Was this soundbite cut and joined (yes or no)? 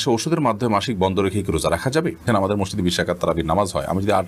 yes